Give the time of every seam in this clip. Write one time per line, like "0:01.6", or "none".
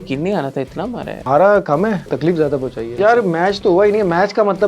0:01.2
0:02.5